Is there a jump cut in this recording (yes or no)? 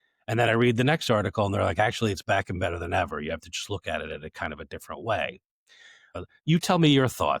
yes